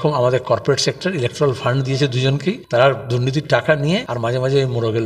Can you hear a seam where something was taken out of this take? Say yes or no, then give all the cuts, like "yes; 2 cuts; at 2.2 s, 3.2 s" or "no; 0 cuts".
yes; 2 cuts; at 2.6 s, 4.1 s